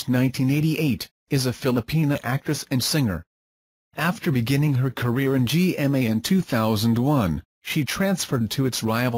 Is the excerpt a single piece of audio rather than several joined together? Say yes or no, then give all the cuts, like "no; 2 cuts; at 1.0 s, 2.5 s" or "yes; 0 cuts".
yes; 0 cuts